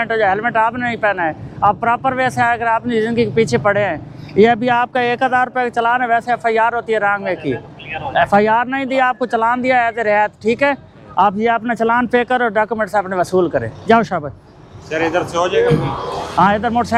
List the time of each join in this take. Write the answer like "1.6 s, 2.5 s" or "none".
none